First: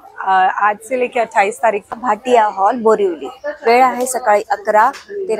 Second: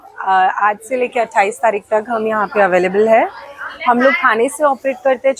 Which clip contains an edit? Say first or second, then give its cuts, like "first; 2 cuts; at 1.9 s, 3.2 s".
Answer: first; 1 cut; at 1.9 s